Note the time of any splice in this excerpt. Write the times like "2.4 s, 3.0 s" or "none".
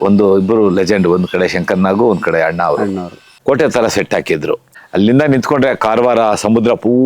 3.2 s